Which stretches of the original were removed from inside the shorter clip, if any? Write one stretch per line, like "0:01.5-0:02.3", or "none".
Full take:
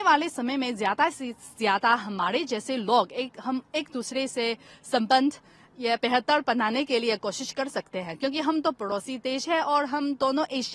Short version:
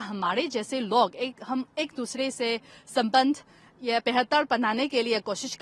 none